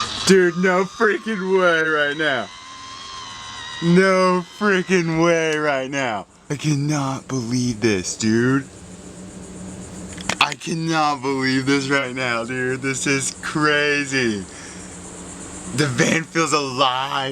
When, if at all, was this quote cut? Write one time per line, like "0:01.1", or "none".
0:06.6